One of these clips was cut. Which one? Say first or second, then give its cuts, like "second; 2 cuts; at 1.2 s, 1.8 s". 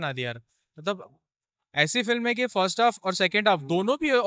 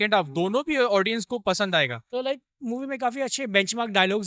second; 1 cut; at 2.0 s